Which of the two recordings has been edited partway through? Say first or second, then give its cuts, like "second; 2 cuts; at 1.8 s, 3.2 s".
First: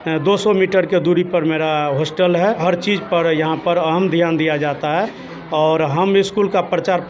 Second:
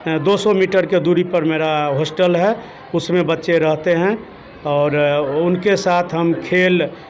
first; 1 cut; at 2.6 s